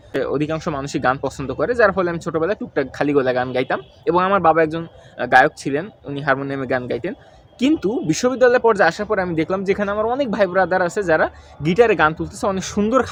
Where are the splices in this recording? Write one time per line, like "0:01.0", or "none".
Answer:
none

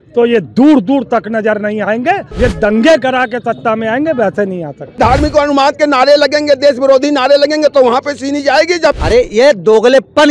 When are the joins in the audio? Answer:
0:02.3
0:04.9
0:09.0

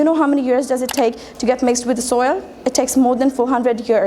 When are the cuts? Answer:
none

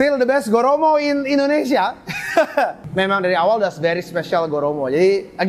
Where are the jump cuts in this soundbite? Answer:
0:02.8

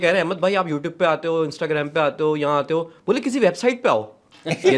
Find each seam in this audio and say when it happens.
none

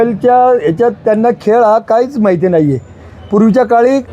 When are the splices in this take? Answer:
none

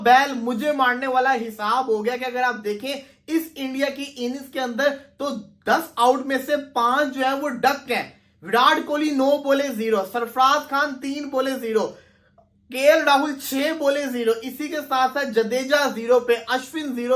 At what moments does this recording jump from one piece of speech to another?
none

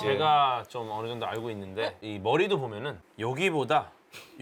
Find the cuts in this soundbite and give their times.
none

